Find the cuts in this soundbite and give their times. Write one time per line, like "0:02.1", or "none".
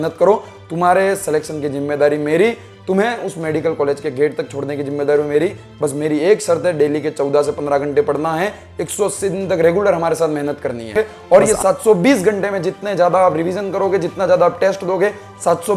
0:11.1